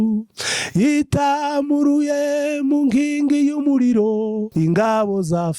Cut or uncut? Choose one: cut